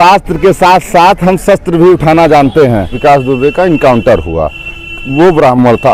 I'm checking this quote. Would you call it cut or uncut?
cut